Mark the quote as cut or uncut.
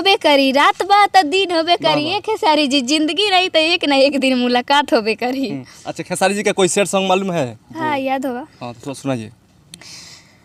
uncut